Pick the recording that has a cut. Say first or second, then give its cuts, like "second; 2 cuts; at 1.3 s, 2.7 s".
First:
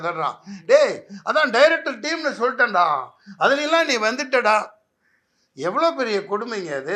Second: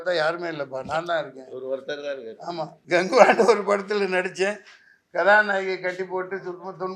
second; 1 cut; at 2.8 s